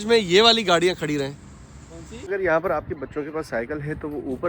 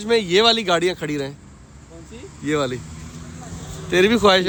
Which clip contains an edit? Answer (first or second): first